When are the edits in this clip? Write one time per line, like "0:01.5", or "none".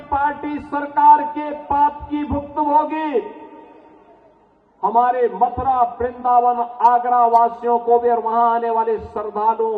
none